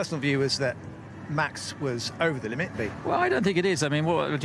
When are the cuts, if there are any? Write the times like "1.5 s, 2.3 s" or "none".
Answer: 3.5 s